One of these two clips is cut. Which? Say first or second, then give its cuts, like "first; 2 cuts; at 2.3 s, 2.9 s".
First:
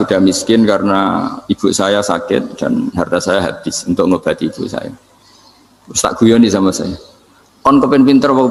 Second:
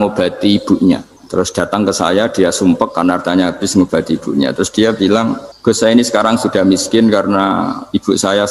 second; 2 cuts; at 1.1 s, 5.5 s